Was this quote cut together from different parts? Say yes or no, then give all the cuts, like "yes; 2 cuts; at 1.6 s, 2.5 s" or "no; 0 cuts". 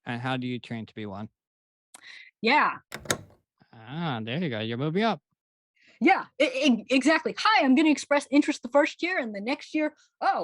yes; 1 cut; at 3.0 s